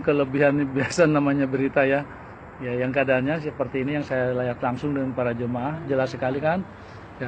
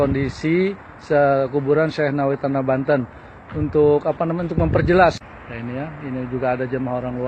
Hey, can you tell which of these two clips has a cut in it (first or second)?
second